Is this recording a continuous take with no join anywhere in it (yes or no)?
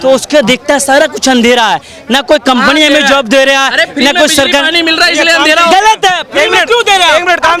yes